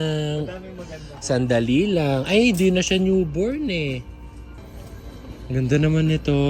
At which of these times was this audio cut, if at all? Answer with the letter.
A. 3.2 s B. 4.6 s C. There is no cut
B